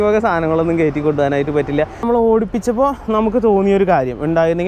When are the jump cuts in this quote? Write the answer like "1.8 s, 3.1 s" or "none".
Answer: 2.0 s